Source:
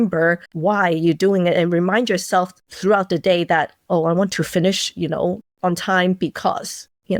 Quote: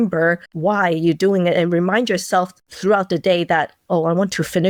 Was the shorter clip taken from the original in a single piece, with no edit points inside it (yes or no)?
yes